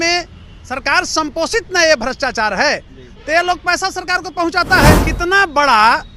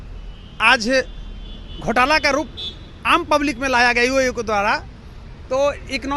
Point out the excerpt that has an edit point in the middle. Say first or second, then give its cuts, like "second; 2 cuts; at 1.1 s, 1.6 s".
first; 1 cut; at 5.1 s